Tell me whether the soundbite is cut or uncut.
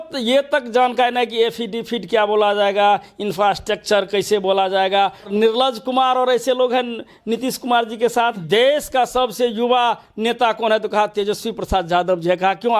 cut